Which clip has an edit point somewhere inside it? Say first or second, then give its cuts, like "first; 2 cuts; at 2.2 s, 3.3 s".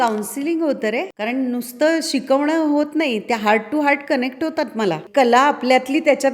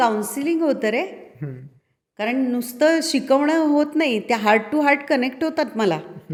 first; 2 cuts; at 1.1 s, 5.0 s